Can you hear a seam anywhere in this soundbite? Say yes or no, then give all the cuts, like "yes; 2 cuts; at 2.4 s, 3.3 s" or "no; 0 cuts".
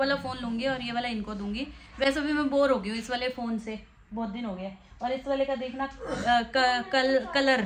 no; 0 cuts